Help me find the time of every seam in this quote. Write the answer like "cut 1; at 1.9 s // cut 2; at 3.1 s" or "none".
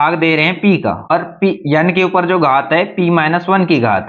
cut 1; at 1.1 s